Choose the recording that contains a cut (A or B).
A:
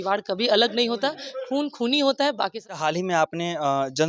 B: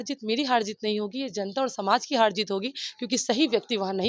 A